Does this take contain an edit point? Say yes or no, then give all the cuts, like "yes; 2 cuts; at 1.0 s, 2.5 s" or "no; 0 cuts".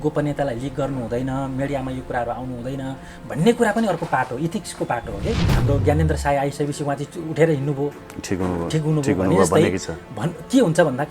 yes; 1 cut; at 5.5 s